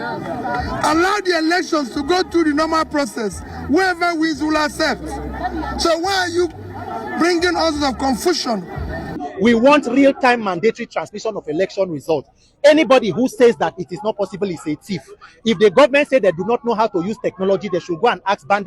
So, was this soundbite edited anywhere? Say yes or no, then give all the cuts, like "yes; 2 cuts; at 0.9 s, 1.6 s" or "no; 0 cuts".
yes; 1 cut; at 9.2 s